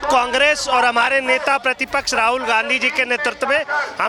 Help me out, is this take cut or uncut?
uncut